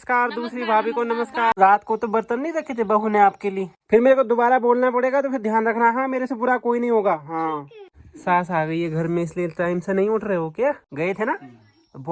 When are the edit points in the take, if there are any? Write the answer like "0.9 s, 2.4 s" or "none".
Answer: 1.6 s, 3.8 s, 7.8 s, 10.9 s